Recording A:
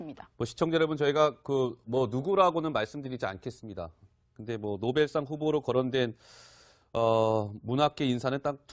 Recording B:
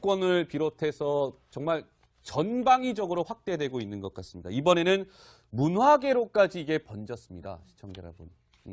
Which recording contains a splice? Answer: A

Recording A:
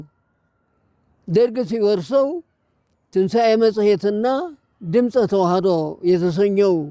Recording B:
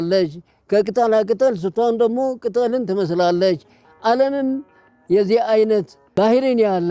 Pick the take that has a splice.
B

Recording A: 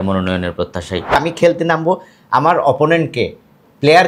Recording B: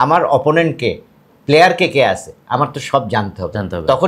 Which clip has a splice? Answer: A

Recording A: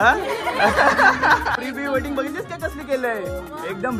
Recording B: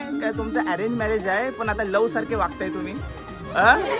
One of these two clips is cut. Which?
A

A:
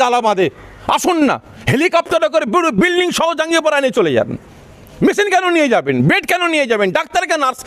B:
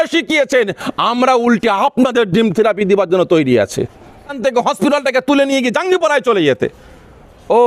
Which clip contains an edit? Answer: B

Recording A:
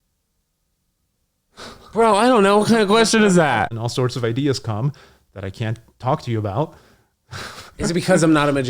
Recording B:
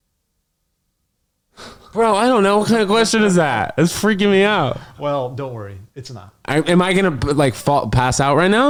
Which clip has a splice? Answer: A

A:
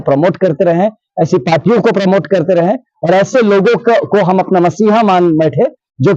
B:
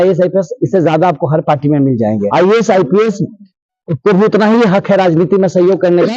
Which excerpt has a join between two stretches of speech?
B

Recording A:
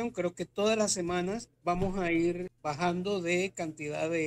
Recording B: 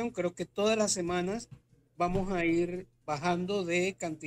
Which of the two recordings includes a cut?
A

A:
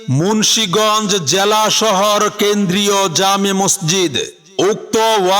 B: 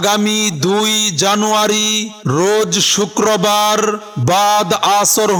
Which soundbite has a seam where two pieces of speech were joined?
A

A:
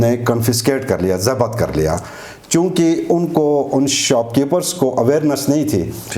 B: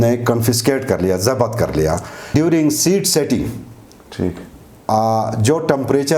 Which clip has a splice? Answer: B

